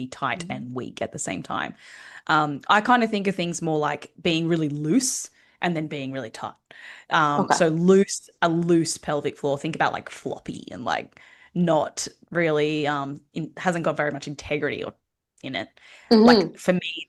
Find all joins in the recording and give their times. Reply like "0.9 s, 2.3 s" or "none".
none